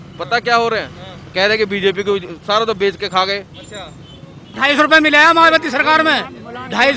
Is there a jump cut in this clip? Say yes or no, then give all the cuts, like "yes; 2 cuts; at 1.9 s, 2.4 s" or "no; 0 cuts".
yes; 1 cut; at 4.5 s